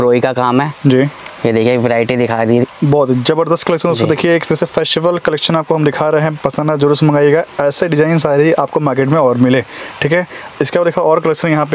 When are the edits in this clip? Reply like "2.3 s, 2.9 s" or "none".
none